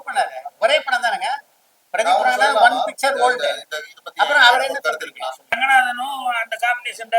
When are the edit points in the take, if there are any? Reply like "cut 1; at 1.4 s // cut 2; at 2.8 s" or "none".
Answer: cut 1; at 5.6 s